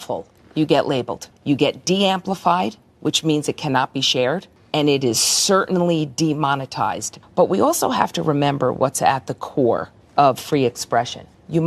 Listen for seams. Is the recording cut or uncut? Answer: cut